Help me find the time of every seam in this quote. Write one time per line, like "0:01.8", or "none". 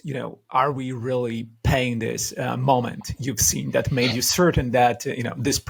none